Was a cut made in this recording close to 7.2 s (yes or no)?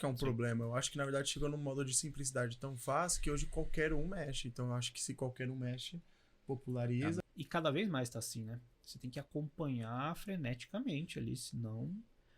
yes